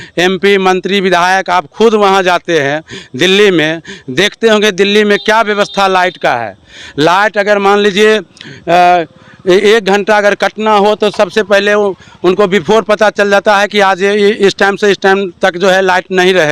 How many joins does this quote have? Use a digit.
0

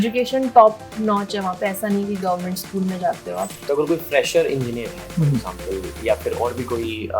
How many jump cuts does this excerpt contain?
1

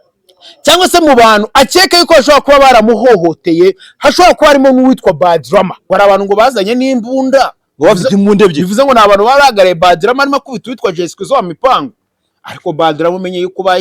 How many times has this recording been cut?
1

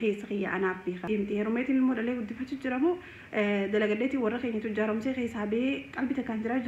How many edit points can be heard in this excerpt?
1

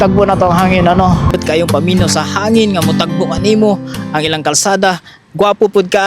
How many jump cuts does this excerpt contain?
1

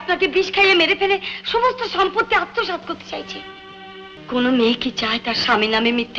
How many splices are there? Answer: 1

